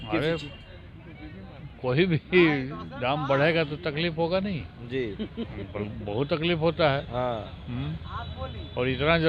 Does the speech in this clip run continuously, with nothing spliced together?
yes; 0 cuts

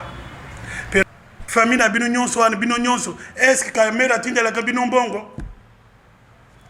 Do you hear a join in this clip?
yes; 1 cut; at 1.0 s

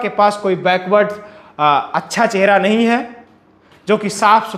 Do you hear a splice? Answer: no; 0 cuts

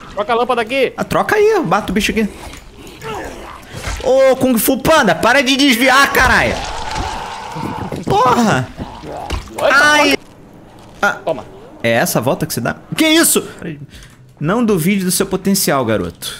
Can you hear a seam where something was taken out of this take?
yes; 2 cuts; at 10.1 s, 13.6 s

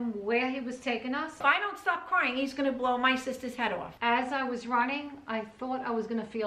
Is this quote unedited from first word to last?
no; 2 cuts; at 1.4 s, 3.9 s

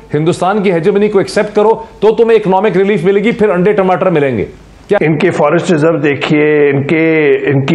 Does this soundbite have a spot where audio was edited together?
no; 0 cuts

